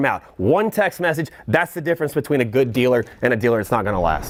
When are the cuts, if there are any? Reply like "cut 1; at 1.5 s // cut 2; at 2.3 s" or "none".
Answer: none